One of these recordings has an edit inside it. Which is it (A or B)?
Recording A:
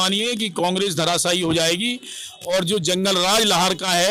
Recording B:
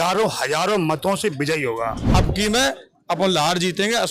B